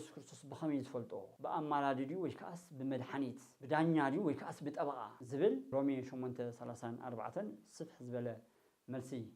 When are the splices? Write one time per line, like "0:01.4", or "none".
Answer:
none